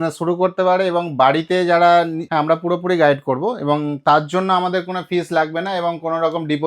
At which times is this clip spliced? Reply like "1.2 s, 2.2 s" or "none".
2.2 s